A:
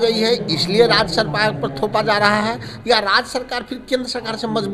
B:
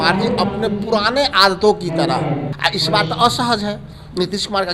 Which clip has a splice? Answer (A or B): B